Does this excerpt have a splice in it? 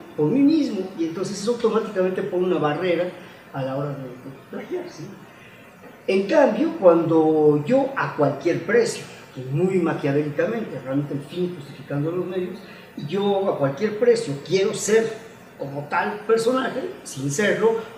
yes; 1 cut; at 12.0 s

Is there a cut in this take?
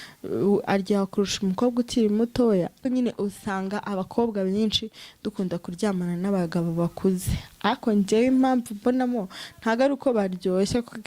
yes; 1 cut; at 2.8 s

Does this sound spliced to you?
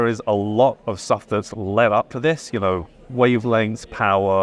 no; 0 cuts

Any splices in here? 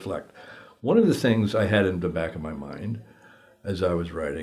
no; 0 cuts

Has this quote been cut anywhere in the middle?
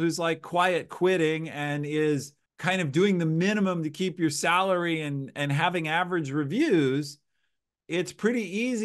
no; 0 cuts

